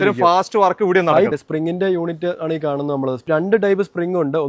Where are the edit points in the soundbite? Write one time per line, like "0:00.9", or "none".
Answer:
0:01.3